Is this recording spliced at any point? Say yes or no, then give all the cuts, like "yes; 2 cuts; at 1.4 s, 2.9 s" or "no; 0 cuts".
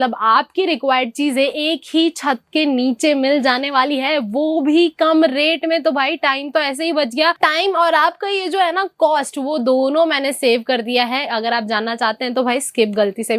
yes; 1 cut; at 7.4 s